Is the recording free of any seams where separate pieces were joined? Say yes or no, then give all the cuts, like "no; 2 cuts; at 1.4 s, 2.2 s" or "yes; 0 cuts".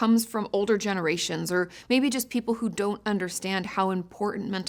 yes; 0 cuts